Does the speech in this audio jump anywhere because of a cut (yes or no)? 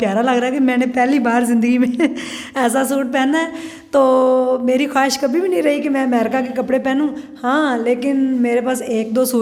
no